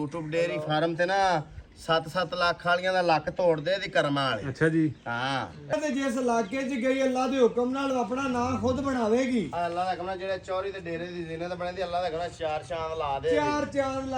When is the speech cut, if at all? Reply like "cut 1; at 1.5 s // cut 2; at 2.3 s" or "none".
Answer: cut 1; at 5.7 s